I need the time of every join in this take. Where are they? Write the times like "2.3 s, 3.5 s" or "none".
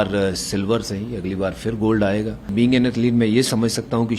2.5 s